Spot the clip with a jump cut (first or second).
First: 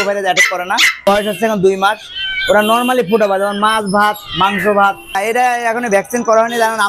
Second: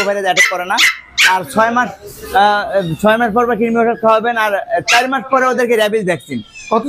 first